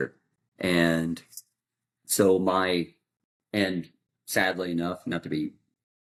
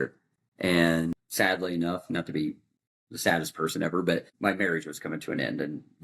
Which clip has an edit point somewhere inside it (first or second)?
second